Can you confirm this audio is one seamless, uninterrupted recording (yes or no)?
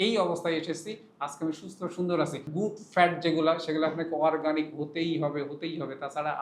no